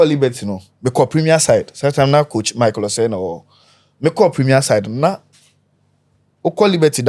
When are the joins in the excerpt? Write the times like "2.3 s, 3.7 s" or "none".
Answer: none